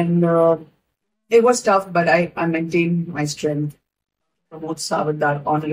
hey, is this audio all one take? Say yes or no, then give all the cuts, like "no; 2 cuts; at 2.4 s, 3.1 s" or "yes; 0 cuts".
no; 1 cut; at 4.4 s